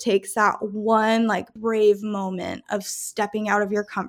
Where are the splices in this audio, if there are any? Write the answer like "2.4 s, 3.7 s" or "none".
1.5 s